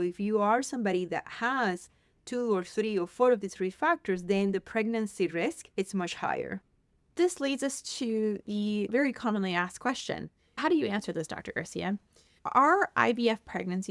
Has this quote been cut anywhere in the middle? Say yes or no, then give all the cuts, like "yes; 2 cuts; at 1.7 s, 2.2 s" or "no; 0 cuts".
no; 0 cuts